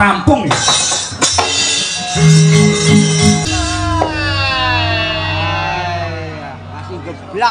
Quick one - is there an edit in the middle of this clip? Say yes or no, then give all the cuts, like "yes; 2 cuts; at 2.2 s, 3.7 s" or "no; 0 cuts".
yes; 1 cut; at 3.4 s